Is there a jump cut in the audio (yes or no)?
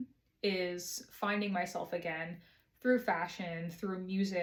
no